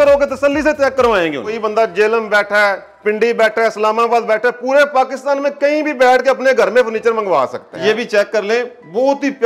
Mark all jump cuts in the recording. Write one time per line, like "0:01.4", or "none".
0:01.6
0:07.7